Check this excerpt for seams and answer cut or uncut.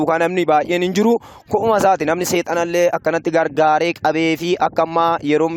uncut